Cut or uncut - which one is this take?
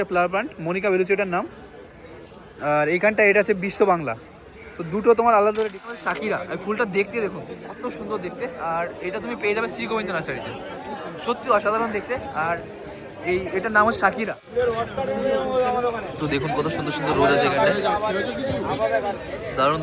cut